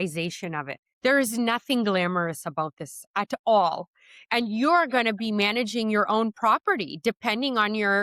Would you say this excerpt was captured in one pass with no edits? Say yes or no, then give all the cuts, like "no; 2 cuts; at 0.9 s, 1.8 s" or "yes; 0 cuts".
yes; 0 cuts